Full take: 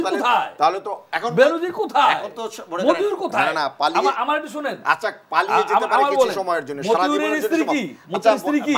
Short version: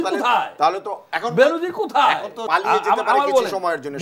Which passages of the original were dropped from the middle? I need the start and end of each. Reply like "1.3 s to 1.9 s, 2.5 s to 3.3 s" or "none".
2.3 s to 5.2 s